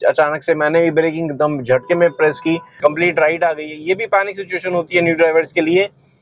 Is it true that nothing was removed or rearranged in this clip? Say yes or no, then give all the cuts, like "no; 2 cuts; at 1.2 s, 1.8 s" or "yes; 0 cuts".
no; 1 cut; at 2.7 s